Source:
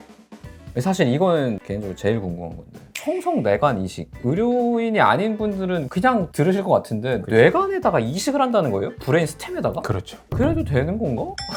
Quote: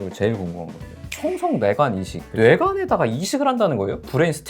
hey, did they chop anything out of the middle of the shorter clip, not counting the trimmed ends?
yes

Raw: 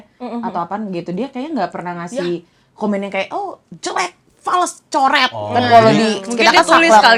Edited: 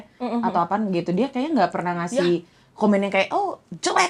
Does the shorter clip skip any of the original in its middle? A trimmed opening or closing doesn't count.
no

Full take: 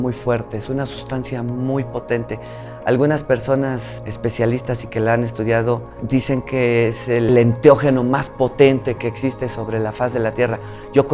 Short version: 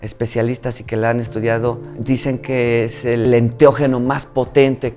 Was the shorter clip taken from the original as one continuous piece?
yes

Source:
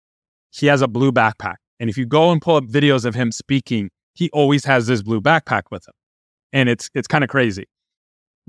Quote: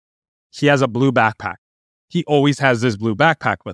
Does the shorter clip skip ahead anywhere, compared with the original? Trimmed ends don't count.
yes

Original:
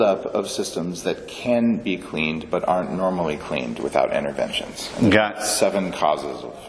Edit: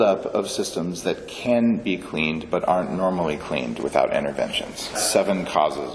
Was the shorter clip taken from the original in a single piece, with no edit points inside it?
no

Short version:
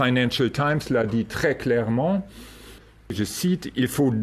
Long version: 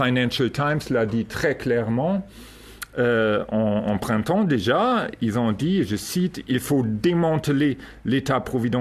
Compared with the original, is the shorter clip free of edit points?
no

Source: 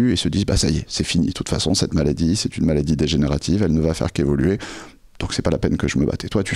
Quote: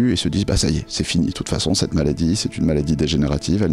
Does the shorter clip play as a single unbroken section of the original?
yes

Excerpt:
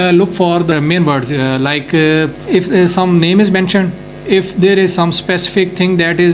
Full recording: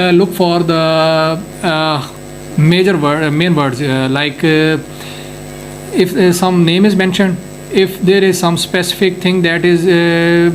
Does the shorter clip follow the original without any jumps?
no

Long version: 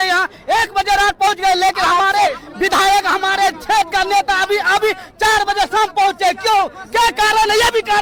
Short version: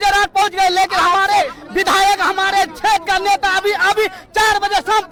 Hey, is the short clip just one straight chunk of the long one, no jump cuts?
yes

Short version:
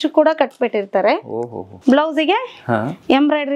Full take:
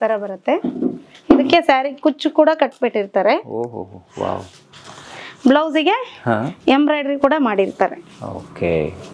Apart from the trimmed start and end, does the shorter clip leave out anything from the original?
yes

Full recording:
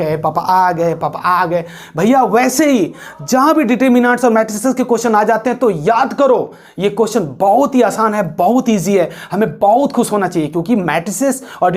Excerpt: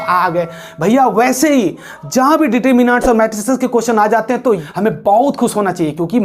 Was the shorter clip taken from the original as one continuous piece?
no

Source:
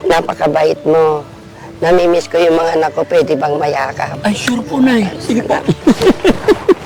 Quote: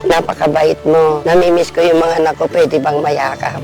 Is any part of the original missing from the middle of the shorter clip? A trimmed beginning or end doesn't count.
yes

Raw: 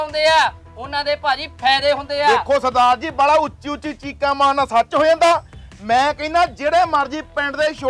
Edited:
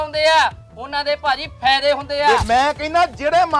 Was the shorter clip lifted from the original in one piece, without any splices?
no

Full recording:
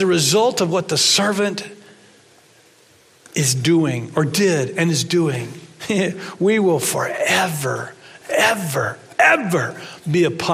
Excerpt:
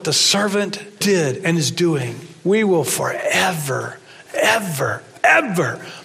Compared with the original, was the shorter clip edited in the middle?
yes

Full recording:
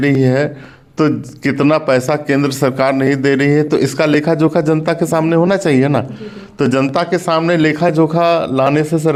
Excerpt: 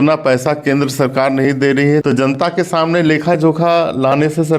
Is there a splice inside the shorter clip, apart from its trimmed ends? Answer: yes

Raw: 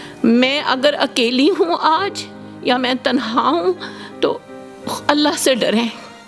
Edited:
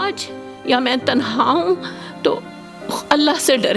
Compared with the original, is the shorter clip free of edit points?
yes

